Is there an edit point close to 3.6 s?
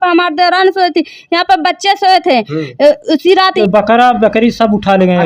yes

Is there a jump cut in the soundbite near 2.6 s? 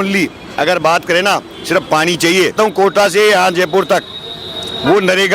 yes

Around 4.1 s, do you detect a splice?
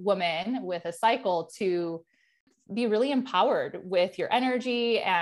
no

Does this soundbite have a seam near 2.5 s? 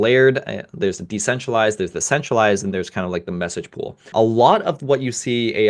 no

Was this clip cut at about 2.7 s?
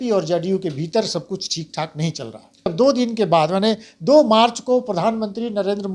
yes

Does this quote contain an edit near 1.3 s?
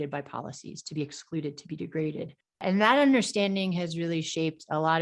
no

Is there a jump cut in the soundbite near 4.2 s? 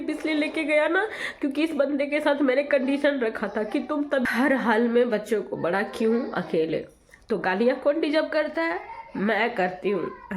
yes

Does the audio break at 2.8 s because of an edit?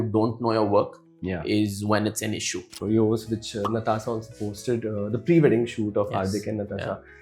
yes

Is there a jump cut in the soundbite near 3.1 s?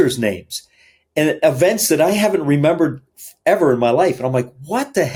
no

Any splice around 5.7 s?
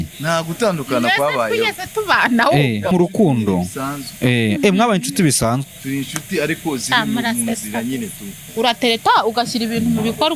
no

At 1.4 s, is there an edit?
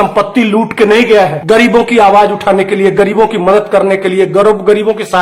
yes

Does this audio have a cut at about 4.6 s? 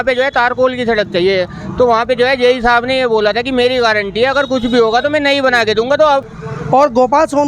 no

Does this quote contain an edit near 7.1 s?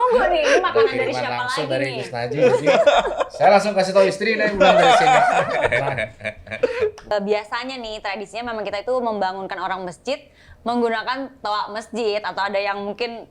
yes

